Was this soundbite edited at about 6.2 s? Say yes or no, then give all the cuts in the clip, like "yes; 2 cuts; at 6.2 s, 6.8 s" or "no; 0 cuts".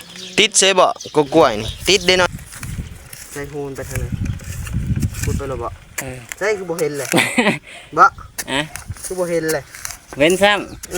yes; 2 cuts; at 2.3 s, 6.2 s